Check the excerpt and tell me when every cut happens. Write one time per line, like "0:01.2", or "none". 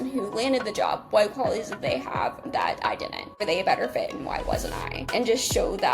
0:03.4
0:05.0